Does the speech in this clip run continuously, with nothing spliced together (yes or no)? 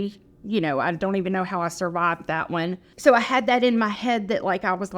no